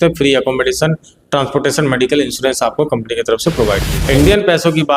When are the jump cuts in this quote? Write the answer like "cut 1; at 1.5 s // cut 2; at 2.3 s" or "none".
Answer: cut 1; at 3.9 s

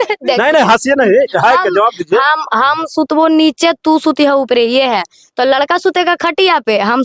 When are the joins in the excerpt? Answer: none

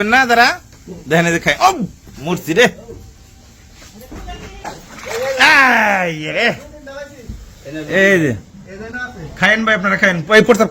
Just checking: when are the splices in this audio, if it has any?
cut 1; at 4.7 s

